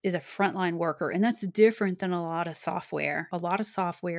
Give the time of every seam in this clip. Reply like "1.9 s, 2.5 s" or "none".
3.3 s